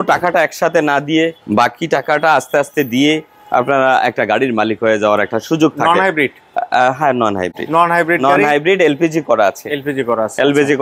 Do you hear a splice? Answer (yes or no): no